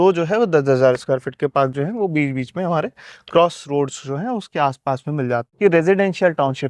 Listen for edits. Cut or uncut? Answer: cut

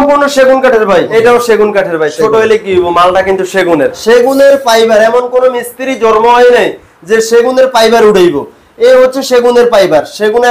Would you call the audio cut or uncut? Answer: cut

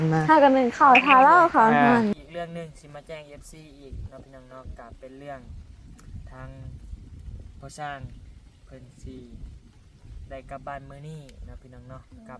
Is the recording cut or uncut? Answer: cut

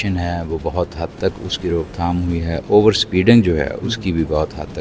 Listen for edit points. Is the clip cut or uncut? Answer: uncut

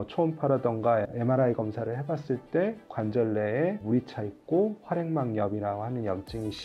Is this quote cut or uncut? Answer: uncut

